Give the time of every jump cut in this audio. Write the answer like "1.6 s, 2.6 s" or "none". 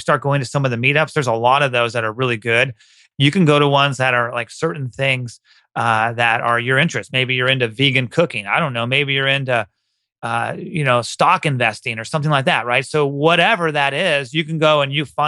3.0 s